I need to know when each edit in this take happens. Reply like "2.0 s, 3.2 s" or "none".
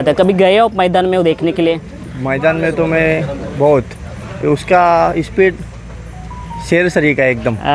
none